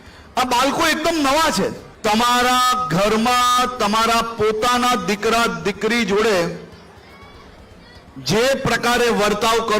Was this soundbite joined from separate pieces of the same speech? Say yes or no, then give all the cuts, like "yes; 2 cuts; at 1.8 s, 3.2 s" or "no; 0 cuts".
yes; 1 cut; at 1.9 s